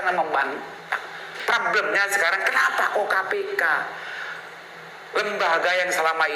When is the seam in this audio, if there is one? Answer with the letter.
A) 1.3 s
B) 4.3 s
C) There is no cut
A